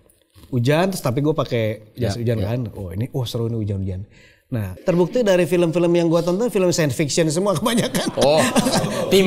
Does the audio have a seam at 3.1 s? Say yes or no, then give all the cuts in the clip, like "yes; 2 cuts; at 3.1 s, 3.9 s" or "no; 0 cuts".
no; 1 cut; at 4.7 s